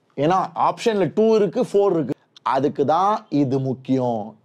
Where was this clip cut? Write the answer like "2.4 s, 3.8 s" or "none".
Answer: 2.1 s